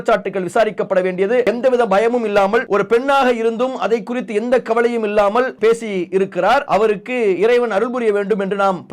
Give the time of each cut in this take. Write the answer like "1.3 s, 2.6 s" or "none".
1.4 s, 2.7 s, 5.5 s, 6.6 s